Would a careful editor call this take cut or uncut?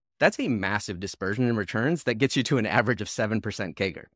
uncut